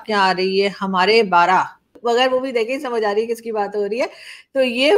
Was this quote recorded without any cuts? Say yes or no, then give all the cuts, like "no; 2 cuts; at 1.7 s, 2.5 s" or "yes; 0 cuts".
no; 1 cut; at 1.8 s